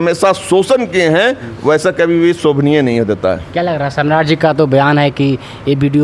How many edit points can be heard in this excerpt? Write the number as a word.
zero